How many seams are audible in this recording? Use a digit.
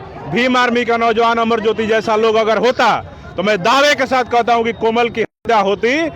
0